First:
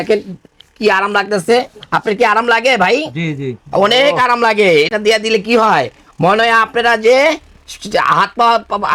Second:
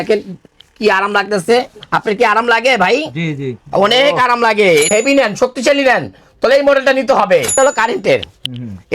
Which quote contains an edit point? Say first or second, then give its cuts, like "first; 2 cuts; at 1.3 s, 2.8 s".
second; 2 cuts; at 4.9 s, 7.5 s